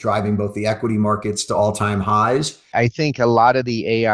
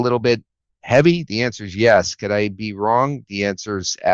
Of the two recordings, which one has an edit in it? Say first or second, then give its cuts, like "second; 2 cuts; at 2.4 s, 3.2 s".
first; 1 cut; at 2.7 s